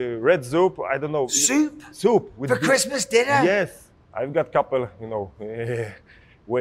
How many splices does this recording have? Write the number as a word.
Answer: one